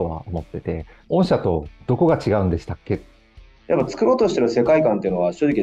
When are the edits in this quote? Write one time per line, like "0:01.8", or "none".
0:01.0
0:01.8
0:03.1